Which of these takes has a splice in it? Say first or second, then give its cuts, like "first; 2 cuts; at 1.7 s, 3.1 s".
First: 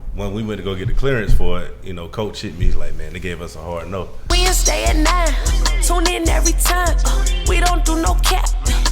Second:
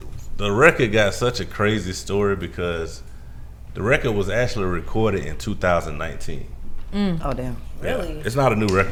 first; 1 cut; at 4.3 s